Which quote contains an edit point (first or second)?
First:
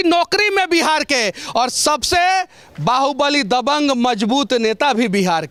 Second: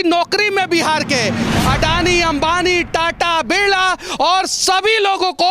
second